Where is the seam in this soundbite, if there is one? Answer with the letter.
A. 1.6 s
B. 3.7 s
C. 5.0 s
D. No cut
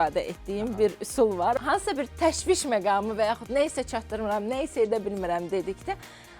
A